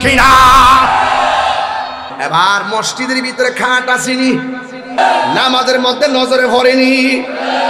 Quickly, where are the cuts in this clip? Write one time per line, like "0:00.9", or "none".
0:02.1
0:05.0